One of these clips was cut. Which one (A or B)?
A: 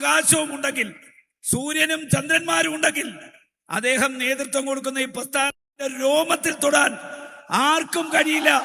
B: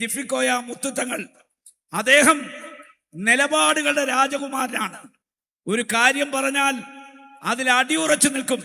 A